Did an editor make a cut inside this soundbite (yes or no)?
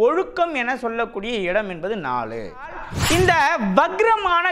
yes